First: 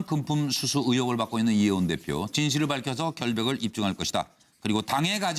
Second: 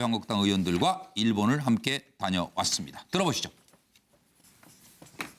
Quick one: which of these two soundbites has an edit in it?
first; 1 cut; at 4.2 s

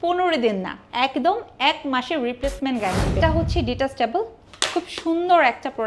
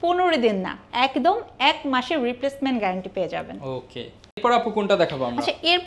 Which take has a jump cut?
first; 1 cut; at 3.2 s

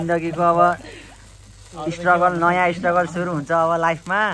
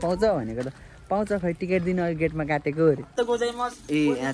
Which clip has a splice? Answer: second; 1 cut; at 3.1 s

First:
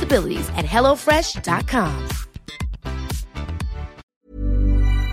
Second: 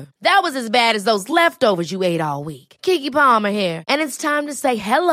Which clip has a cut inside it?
first; 1 cut; at 4.1 s

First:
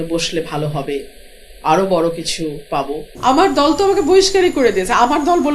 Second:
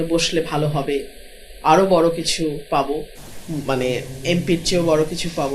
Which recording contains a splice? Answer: first; 1 cut; at 3.1 s

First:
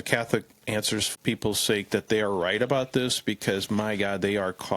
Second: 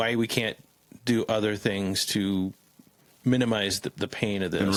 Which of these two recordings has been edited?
first; 1 cut; at 1.1 s

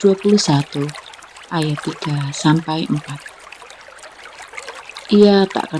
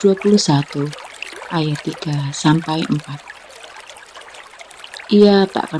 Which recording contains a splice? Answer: first; 2 cuts; at 3.4 s, 4.9 s

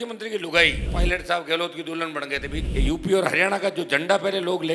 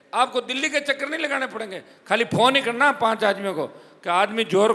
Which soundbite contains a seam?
first; 2 cuts; at 0.9 s, 2.6 s

